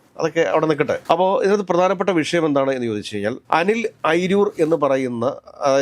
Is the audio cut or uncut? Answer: uncut